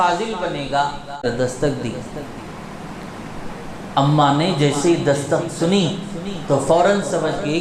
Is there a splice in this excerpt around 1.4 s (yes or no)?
yes